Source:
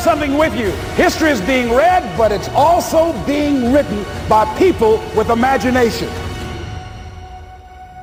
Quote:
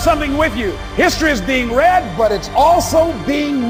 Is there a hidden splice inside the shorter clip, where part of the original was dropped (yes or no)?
no